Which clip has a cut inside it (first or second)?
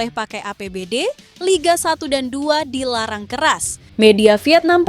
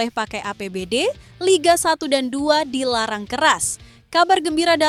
first